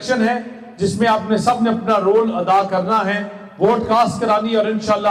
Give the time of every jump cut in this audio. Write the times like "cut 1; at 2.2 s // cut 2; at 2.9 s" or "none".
none